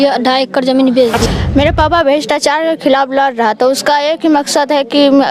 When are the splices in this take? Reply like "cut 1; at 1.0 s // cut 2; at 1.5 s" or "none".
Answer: cut 1; at 1.2 s